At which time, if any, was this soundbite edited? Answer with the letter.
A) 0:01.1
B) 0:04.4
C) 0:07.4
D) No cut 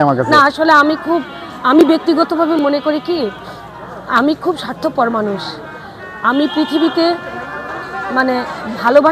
D